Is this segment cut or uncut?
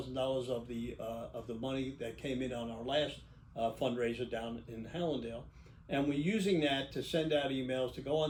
uncut